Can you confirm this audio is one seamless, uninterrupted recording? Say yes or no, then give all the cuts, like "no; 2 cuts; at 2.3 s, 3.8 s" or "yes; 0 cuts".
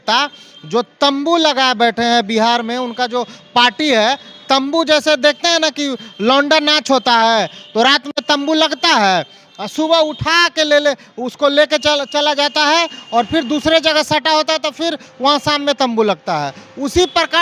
yes; 0 cuts